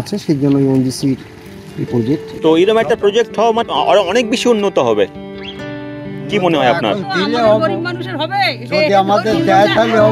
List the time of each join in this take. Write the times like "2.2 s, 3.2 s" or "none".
2.4 s, 3.6 s

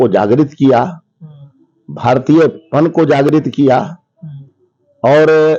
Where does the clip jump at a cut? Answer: none

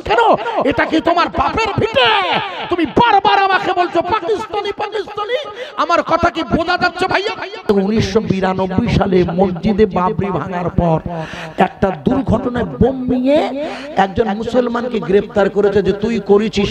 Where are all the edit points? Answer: 7.7 s

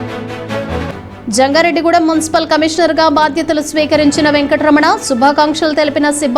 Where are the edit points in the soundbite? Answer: 1.1 s

